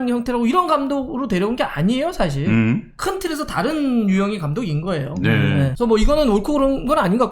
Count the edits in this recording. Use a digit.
1